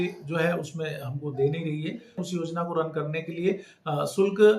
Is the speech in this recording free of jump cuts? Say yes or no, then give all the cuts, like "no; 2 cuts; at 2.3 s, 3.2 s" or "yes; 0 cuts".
no; 1 cut; at 2.2 s